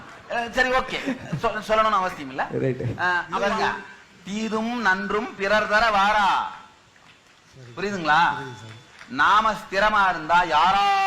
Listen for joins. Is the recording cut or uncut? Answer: cut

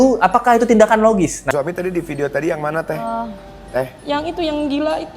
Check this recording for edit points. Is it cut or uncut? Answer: cut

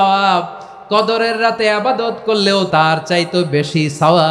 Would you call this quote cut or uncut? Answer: cut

